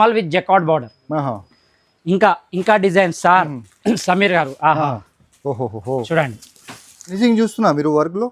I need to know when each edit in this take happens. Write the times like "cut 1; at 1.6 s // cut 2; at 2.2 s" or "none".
cut 1; at 7.1 s